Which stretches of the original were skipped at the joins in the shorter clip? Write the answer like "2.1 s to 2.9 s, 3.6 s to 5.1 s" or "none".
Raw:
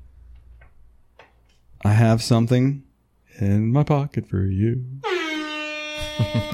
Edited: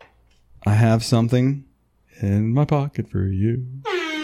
none